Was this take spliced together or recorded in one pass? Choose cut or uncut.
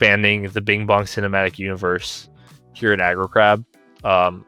uncut